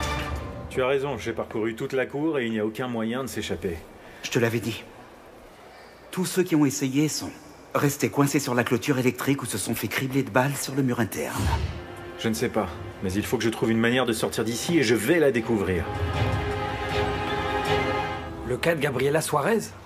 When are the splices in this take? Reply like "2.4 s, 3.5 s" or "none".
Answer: 18.1 s